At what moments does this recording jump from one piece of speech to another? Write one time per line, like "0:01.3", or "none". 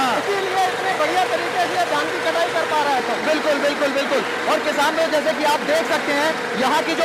none